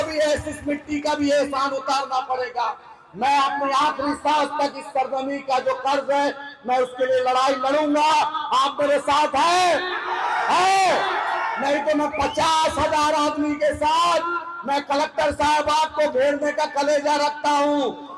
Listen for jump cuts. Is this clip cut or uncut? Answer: uncut